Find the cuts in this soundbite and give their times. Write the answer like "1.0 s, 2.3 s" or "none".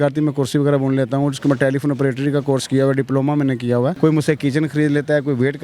3.9 s

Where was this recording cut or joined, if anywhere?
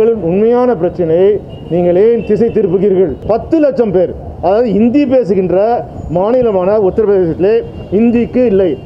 3.2 s

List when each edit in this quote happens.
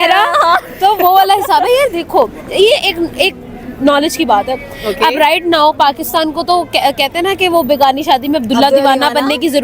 none

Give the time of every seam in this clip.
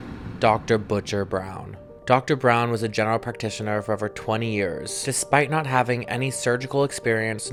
none

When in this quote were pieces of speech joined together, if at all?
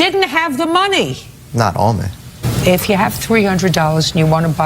2.4 s

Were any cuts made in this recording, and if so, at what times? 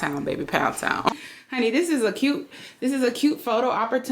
1.1 s

